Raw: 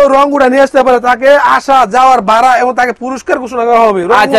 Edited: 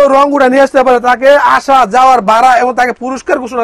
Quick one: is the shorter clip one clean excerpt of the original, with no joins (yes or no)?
yes